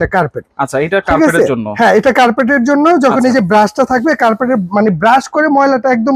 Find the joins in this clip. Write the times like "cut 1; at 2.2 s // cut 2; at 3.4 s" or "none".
none